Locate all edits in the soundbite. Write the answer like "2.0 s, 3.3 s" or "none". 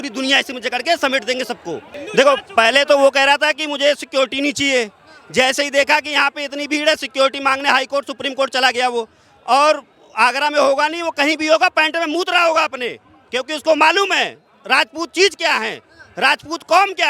1.9 s